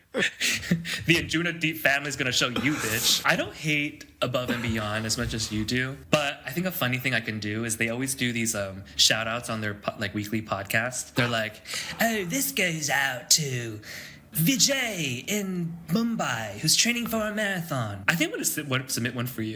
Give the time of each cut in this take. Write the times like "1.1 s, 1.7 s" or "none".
3.1 s, 6.0 s, 11.0 s, 14.2 s, 18.0 s